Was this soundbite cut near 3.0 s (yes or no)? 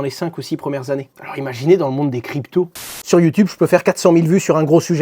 yes